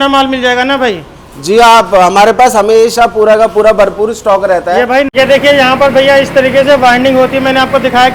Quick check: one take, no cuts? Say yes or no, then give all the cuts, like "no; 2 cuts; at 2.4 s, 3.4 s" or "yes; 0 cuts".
yes; 0 cuts